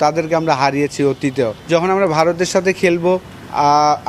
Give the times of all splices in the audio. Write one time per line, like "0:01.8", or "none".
0:01.6